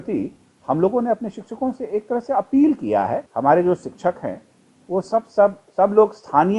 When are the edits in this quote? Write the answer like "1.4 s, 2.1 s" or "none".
3.3 s